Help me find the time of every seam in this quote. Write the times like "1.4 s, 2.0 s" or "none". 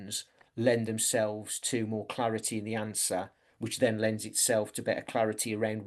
none